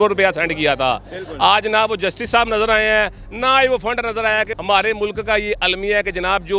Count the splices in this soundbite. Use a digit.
1